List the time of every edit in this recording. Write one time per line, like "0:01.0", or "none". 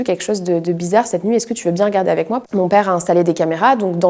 0:02.5